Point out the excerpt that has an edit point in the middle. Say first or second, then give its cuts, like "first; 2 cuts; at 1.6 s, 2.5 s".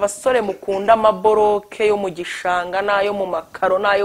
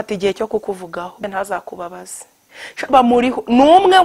second; 1 cut; at 1.2 s